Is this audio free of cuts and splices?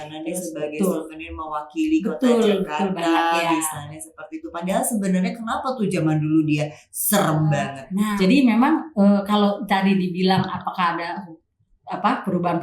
no; 1 cut; at 8.0 s

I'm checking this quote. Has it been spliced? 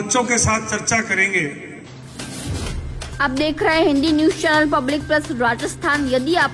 yes; 1 cut; at 1.9 s

